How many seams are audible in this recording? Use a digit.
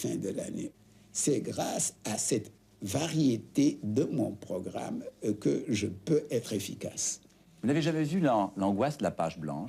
1